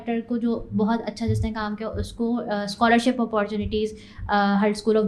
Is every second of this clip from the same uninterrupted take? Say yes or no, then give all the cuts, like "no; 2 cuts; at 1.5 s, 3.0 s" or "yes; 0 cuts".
yes; 0 cuts